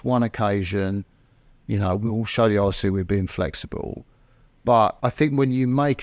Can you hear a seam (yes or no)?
yes